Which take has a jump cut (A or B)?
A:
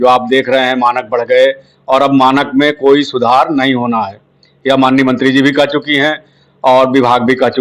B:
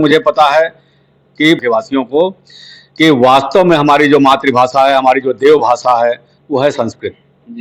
B